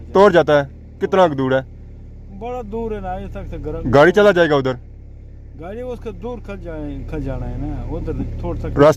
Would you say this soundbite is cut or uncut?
uncut